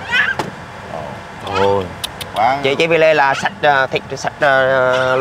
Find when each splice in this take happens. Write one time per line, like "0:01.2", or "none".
none